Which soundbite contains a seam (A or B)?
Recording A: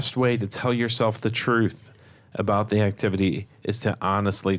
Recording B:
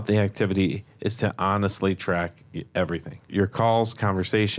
B